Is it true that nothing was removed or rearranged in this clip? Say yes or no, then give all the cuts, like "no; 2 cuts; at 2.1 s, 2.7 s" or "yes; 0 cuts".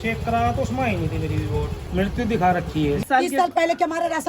no; 2 cuts; at 1.8 s, 3.0 s